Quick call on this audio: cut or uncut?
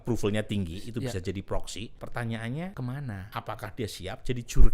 cut